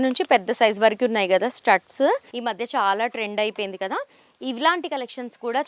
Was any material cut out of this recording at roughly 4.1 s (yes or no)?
no